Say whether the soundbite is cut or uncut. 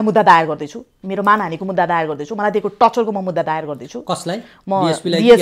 uncut